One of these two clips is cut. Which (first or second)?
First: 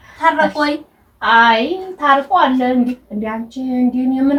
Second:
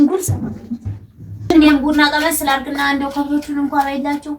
second